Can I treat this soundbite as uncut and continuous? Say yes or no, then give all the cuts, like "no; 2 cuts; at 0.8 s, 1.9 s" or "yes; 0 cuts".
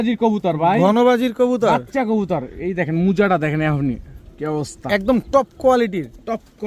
yes; 0 cuts